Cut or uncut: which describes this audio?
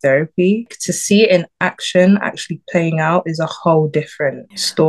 uncut